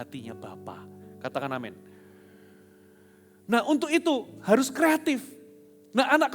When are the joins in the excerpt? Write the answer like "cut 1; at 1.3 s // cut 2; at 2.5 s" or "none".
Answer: none